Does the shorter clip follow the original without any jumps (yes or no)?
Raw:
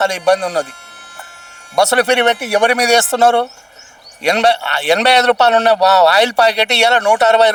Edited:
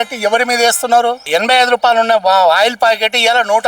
no